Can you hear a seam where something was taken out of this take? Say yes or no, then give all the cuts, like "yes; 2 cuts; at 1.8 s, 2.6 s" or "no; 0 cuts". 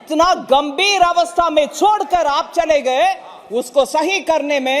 no; 0 cuts